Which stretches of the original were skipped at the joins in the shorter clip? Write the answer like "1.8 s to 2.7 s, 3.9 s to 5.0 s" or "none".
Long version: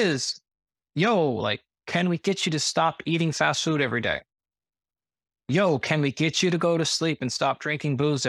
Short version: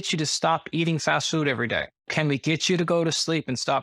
4.4 s to 5.8 s